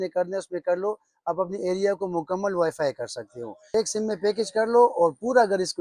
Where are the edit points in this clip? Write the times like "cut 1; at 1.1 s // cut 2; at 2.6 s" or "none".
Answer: cut 1; at 3.7 s